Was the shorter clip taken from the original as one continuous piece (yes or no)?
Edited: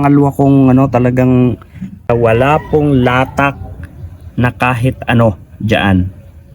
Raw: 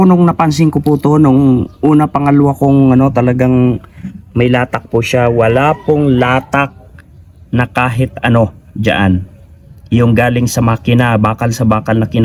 no